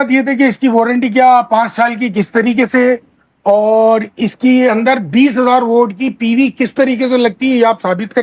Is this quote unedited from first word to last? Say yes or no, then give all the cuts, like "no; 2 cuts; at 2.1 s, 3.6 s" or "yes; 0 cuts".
yes; 0 cuts